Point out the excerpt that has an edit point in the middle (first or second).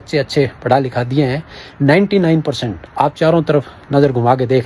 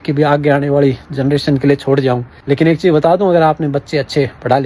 second